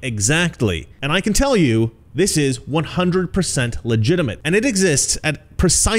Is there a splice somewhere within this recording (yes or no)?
yes